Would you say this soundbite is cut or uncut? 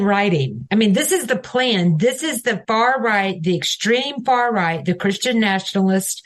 uncut